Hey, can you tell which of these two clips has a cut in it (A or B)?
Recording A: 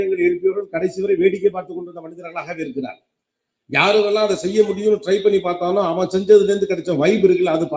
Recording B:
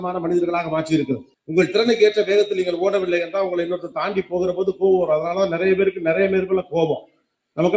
B